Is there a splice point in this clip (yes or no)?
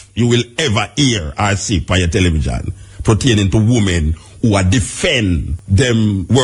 yes